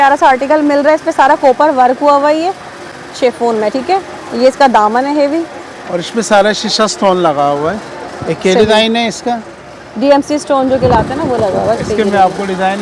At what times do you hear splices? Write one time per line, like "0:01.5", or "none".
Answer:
none